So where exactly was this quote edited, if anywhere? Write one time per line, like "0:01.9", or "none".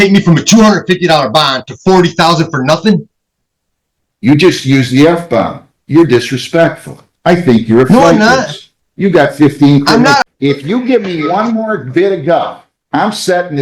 0:10.2